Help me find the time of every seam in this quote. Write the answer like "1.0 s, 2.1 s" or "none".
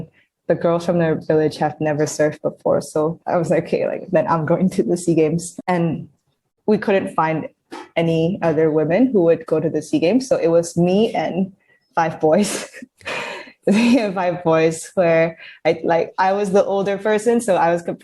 3.2 s, 5.5 s